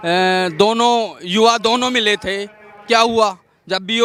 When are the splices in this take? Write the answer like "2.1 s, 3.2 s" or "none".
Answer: none

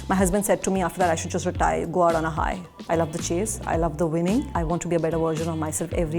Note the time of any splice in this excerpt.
2.7 s, 4.5 s

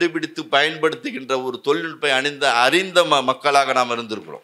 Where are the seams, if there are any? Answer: none

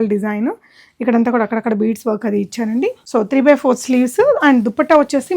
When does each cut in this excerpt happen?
3.0 s

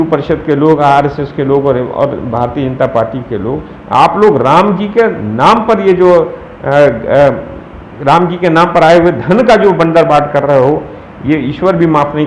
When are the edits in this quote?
none

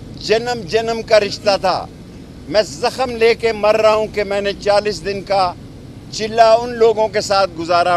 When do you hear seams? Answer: none

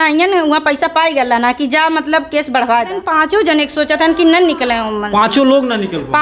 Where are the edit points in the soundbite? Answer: 3.1 s

